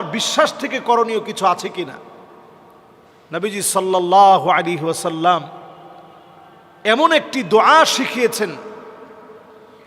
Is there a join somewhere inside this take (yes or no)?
no